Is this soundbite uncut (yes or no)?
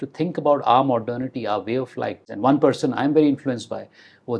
no